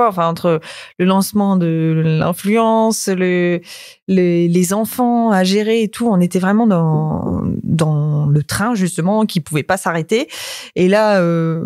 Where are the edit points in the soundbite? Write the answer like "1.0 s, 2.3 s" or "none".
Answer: none